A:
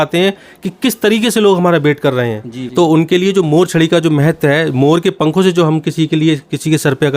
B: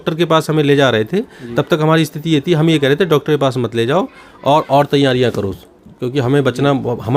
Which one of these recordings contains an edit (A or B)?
A